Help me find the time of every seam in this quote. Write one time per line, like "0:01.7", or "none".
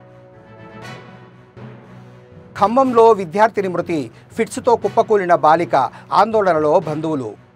0:01.7